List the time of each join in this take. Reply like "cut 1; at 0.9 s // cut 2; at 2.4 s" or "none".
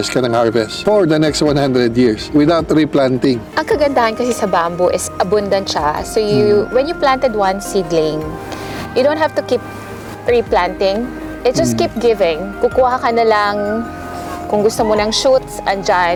none